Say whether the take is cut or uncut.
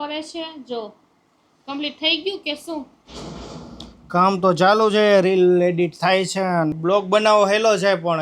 cut